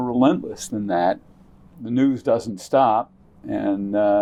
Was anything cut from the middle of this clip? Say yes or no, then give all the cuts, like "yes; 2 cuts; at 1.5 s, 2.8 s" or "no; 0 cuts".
no; 0 cuts